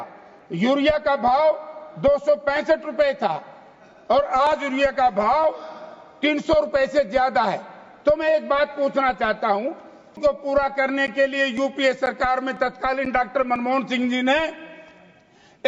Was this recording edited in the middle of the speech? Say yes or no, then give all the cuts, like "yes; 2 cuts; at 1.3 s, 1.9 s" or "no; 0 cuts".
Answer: yes; 1 cut; at 10.2 s